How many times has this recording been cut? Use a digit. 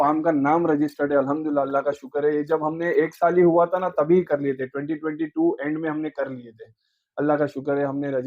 0